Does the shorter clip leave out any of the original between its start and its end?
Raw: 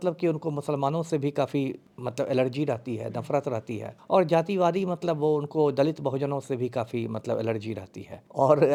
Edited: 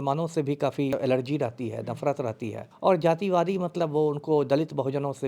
yes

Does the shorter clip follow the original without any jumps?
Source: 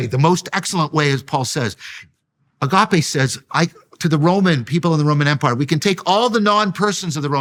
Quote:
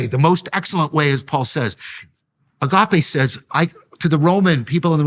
yes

